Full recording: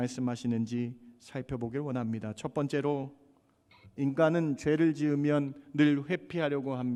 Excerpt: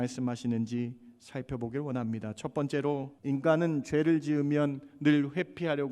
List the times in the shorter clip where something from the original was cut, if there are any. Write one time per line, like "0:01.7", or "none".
0:03.1